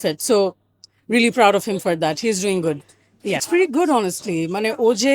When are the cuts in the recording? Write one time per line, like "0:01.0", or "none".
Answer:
0:03.4